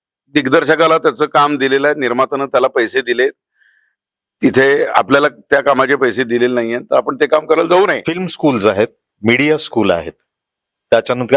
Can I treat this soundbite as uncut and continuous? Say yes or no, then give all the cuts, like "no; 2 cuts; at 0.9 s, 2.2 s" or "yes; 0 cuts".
no; 1 cut; at 8.3 s